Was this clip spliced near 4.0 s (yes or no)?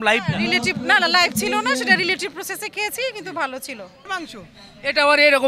yes